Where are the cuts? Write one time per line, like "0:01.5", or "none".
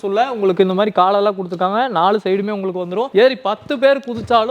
0:03.1